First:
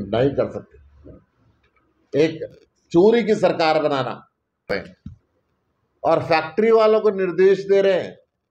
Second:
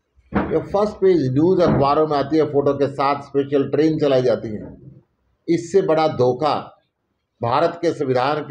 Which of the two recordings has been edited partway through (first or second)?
first